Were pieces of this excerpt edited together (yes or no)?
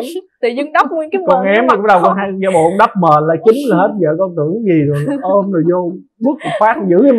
no